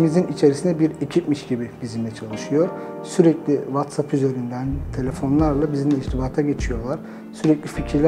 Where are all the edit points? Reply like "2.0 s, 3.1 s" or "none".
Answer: none

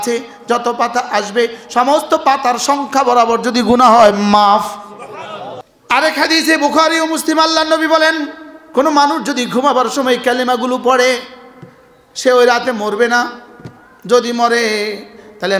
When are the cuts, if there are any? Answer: 5.6 s

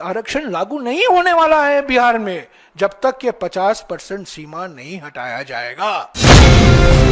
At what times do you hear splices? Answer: 6.1 s

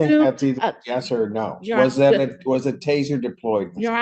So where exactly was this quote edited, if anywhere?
none

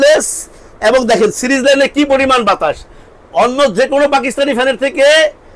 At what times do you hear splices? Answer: none

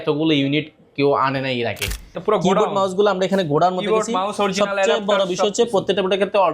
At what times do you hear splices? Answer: 2.1 s

